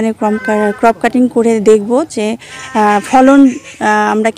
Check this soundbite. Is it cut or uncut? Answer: uncut